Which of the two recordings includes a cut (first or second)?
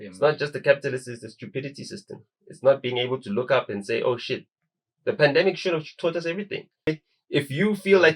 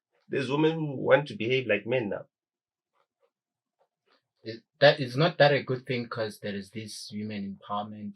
first